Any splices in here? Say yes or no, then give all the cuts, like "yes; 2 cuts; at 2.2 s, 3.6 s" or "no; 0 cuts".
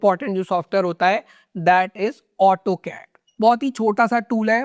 yes; 1 cut; at 3.2 s